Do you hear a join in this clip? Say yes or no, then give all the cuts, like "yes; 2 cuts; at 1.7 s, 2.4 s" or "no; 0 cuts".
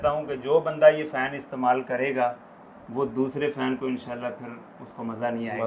no; 0 cuts